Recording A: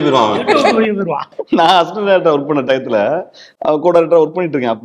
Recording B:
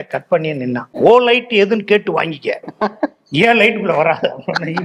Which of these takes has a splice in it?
A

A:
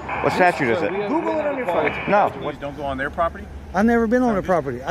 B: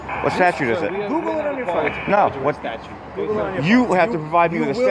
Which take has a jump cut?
A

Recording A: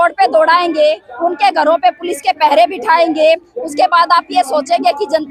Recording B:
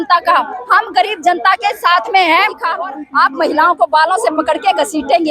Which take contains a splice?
B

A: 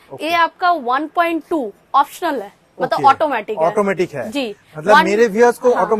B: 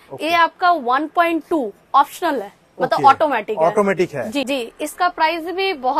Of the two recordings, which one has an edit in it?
B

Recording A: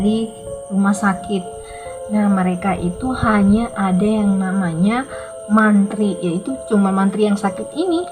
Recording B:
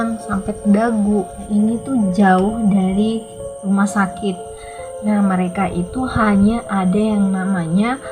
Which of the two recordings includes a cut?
B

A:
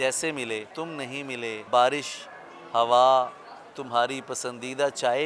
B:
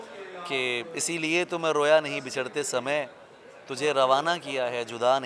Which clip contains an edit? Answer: A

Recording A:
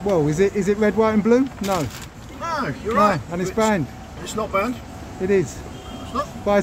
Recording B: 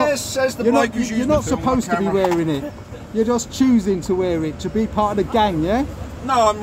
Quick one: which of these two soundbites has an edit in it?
A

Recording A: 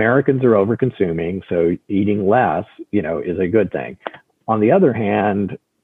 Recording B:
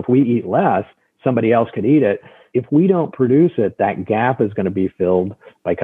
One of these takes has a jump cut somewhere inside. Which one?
B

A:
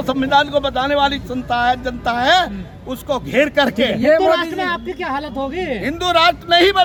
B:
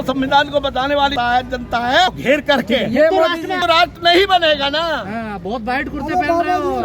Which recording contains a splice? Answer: B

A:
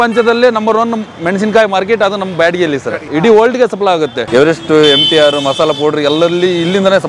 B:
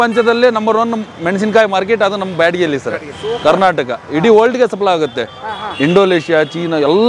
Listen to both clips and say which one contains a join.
A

